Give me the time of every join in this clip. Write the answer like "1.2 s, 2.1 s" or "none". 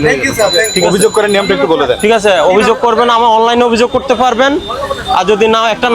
none